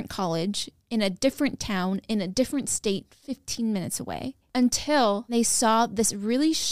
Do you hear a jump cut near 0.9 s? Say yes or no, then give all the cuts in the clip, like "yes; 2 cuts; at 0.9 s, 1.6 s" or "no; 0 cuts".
no; 1 cut; at 5.3 s